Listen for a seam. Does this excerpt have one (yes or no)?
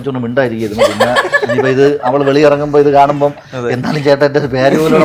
no